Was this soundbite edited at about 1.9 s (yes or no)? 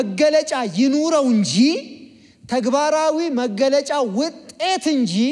no